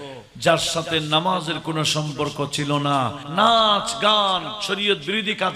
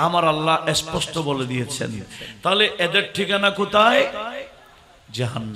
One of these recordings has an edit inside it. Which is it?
first; 1 cut; at 3.2 s

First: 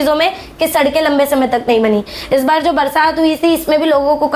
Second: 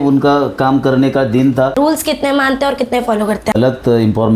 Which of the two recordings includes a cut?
second; 2 cuts; at 1.8 s, 3.5 s

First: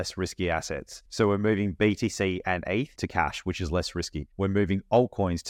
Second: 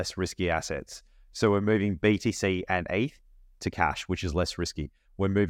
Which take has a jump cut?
first; 3 cuts; at 1.0 s, 2.9 s, 4.2 s

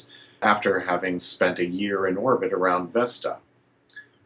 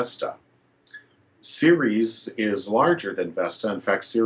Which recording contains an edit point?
second; 1 cut; at 3.2 s

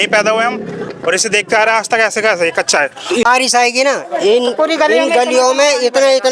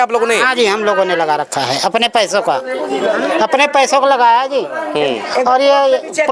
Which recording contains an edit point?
first; 1 cut; at 3.3 s

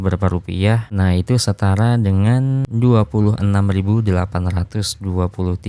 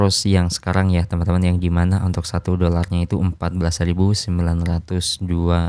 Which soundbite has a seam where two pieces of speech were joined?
first; 2 cuts; at 0.9 s, 2.7 s

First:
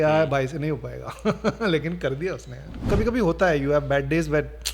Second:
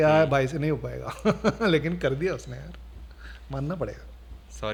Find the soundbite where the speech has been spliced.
first; 1 cut; at 2.8 s

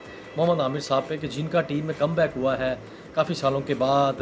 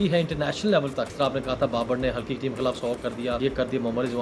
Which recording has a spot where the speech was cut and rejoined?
second; 2 cuts; at 1.1 s, 3.4 s

